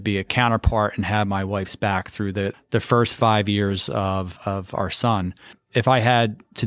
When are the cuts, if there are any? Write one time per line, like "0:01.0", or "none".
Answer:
0:02.5
0:04.4
0:05.5